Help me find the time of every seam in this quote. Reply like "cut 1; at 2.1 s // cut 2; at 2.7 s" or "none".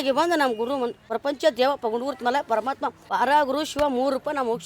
cut 1; at 1.1 s // cut 2; at 3.0 s